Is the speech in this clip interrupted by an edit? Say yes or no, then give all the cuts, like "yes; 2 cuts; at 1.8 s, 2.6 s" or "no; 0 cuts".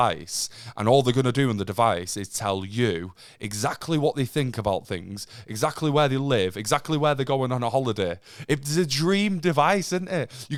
no; 0 cuts